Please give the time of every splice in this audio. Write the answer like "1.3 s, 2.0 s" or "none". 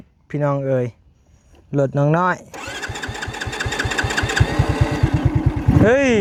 none